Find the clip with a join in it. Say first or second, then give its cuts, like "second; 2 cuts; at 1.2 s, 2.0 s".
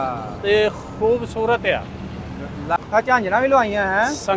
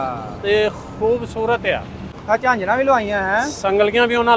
second; 1 cut; at 2.2 s